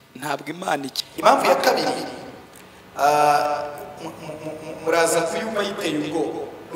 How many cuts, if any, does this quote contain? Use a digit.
1